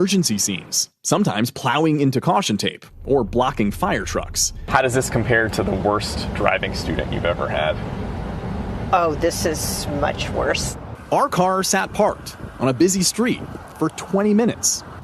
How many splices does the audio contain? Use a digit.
2